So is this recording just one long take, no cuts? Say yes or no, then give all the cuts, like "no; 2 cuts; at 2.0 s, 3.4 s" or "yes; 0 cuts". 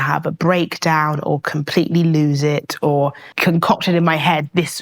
no; 1 cut; at 3.3 s